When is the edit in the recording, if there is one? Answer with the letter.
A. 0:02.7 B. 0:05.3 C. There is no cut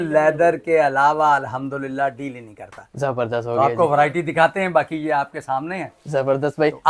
C